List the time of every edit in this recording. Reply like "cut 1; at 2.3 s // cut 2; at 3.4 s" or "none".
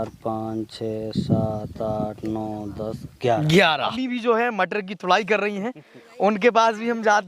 cut 1; at 4.0 s